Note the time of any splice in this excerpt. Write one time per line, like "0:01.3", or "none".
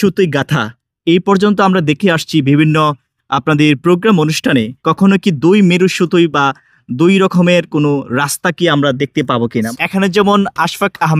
0:04.8
0:09.7